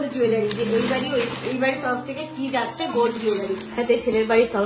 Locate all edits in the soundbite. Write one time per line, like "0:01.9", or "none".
0:03.7